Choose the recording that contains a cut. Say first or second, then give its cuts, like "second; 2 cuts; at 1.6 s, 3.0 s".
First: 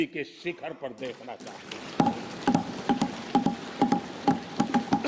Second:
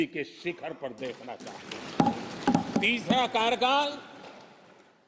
second; 1 cut; at 2.7 s